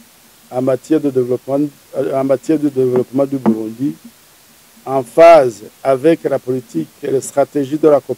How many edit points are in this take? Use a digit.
0